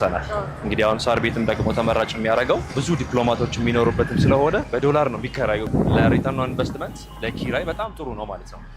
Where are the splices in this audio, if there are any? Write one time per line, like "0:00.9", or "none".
0:02.8
0:04.7
0:05.7